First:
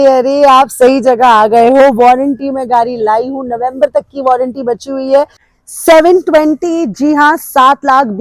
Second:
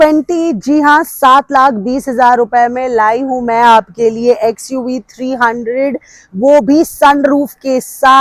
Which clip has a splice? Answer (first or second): first